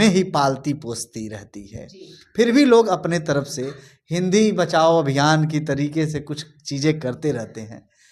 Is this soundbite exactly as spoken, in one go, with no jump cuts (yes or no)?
yes